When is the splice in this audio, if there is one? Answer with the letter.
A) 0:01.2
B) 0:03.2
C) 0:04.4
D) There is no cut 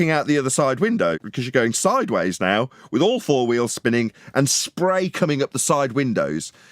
A